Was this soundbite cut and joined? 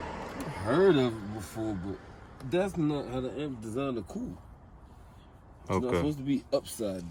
no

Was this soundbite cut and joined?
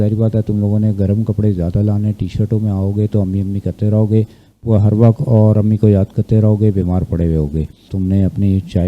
yes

